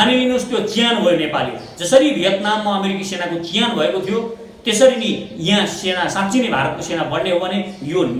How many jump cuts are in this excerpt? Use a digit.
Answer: 0